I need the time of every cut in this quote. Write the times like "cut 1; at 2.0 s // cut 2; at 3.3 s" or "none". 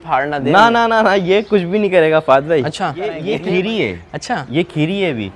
cut 1; at 3.3 s